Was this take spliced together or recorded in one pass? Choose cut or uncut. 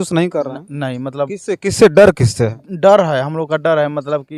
uncut